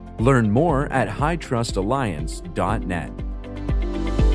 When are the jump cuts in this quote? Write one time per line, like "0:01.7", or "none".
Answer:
0:03.3